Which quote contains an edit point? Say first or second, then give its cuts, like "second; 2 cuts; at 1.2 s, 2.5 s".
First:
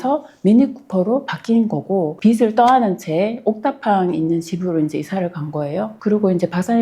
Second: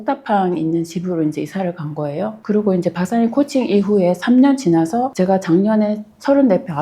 first; 1 cut; at 2.2 s